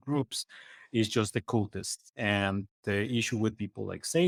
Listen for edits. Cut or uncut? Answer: uncut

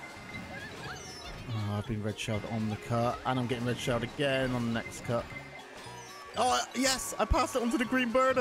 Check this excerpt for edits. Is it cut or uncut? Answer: uncut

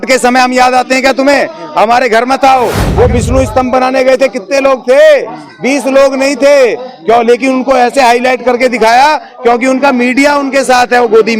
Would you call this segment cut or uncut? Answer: cut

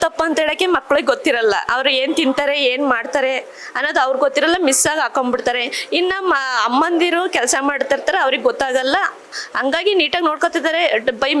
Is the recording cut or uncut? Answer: uncut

